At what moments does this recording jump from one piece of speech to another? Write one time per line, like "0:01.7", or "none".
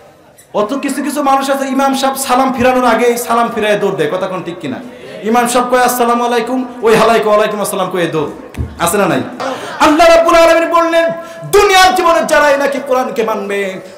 0:09.5